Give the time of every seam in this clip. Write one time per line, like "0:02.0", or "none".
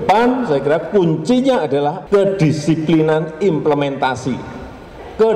0:02.0